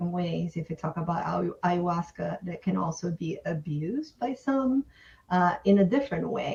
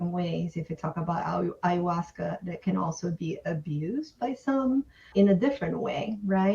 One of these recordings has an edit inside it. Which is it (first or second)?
second